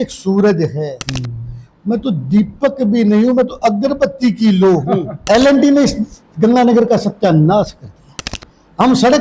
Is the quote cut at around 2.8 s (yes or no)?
no